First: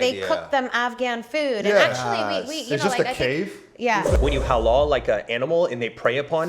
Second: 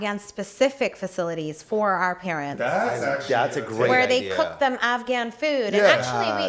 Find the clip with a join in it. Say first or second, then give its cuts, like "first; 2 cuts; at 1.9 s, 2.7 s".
first; 1 cut; at 4.1 s